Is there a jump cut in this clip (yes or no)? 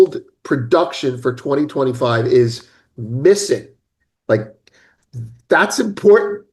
no